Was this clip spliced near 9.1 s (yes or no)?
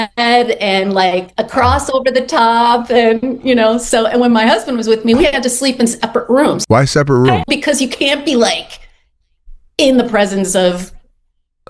no